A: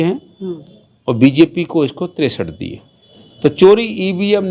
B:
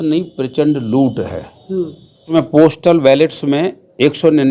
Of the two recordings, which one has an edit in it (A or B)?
B